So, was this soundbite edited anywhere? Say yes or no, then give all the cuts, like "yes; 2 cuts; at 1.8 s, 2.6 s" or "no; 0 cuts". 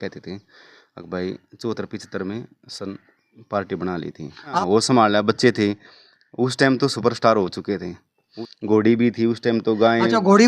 yes; 2 cuts; at 4.6 s, 8.4 s